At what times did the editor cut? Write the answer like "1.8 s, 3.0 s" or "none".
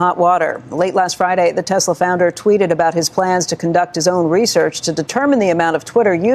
none

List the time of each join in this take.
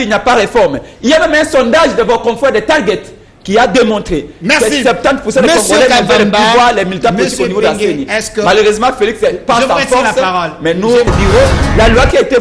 11.1 s

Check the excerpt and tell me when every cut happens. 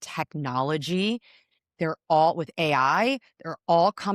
none

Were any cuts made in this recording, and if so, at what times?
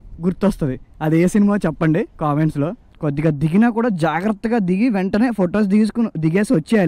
2.9 s

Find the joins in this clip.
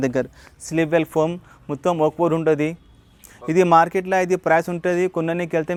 none

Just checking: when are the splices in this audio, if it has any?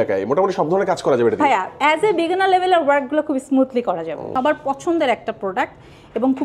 4.2 s

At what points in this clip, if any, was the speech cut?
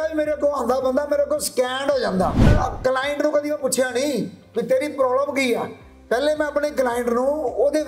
2.5 s

